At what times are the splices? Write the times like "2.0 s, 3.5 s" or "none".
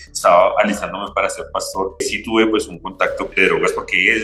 3.3 s